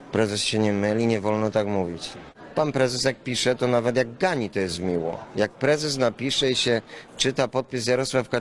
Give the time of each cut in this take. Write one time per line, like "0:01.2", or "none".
none